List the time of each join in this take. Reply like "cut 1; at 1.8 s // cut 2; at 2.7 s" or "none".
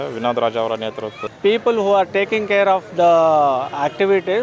cut 1; at 1.2 s

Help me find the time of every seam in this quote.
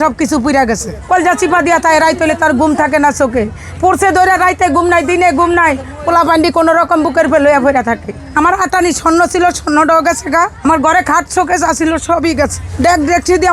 cut 1; at 0.9 s // cut 2; at 8.1 s // cut 3; at 10.6 s // cut 4; at 12.6 s

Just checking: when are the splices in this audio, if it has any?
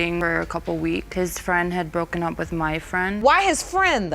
cut 1; at 3.2 s

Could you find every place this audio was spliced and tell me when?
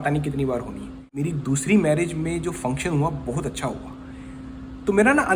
cut 1; at 1.1 s

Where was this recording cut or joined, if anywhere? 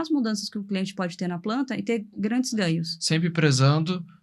cut 1; at 2.9 s

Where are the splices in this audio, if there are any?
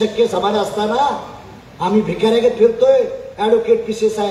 none

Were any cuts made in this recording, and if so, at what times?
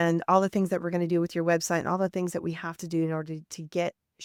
none

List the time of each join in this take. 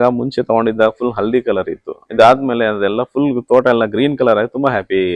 none

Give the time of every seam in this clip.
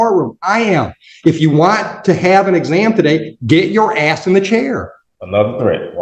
cut 1; at 5.0 s

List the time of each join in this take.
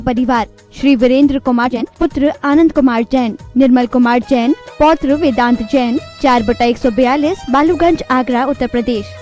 cut 1; at 1.7 s

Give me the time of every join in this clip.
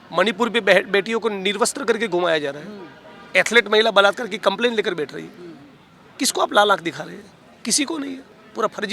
none

